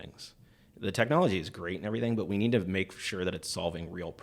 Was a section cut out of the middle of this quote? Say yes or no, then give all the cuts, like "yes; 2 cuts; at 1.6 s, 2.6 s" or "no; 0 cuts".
no; 0 cuts